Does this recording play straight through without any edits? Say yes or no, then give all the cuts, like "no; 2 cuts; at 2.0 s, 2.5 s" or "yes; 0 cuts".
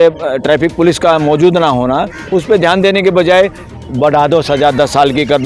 no; 1 cut; at 2.2 s